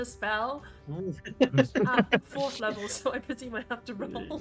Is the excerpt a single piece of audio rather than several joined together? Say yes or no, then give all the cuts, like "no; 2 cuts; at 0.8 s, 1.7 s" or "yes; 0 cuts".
yes; 0 cuts